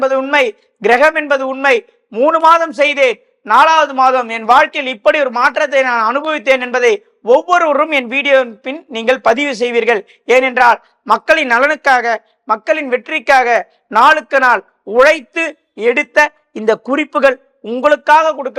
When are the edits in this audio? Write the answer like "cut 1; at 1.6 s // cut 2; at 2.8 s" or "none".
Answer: none